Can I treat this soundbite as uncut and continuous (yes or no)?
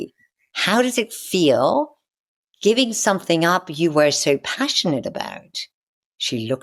yes